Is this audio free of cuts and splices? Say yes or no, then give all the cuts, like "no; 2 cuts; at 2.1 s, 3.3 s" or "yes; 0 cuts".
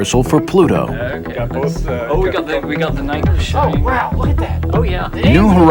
no; 1 cut; at 2.7 s